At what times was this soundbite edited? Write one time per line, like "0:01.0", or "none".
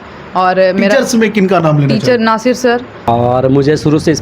0:02.9